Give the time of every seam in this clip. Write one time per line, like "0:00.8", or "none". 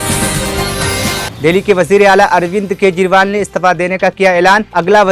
0:01.1